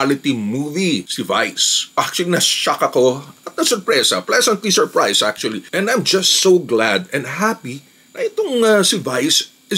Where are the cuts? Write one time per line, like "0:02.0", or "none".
0:01.8
0:05.7